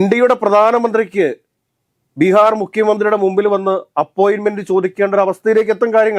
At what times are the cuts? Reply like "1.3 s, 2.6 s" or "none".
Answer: none